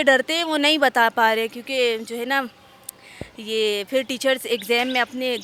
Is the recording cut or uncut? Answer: uncut